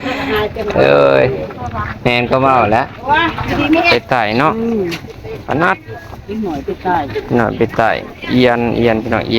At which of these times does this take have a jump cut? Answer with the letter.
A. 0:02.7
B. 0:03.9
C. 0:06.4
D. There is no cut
B